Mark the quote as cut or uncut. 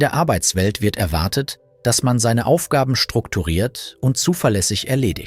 cut